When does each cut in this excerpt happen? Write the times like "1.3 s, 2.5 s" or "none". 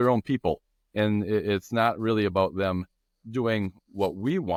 none